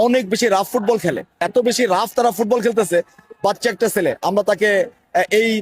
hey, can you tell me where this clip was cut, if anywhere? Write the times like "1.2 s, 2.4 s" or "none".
1.4 s